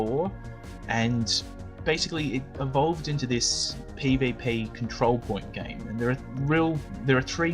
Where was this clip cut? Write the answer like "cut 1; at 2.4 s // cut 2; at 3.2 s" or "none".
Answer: cut 1; at 6.2 s